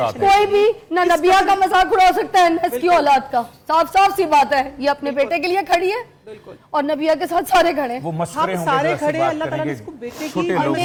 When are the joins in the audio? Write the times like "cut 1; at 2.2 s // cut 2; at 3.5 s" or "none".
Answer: none